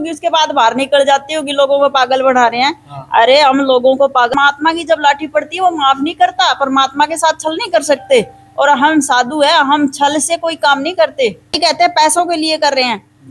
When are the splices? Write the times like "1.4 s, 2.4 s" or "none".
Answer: 4.3 s, 11.6 s